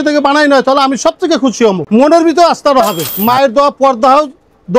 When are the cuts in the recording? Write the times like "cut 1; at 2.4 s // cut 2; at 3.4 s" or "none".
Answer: cut 1; at 1.8 s // cut 2; at 3.1 s